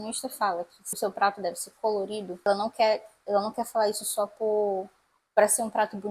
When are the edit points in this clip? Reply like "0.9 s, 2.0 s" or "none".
1.0 s